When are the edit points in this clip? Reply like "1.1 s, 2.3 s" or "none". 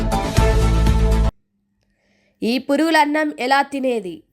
1.3 s